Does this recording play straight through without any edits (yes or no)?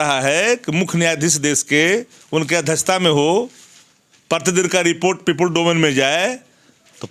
yes